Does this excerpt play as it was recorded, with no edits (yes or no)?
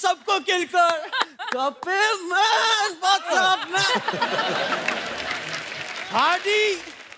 yes